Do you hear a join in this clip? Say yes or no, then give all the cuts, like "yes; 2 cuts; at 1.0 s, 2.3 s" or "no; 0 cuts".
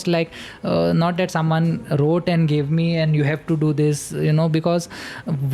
no; 0 cuts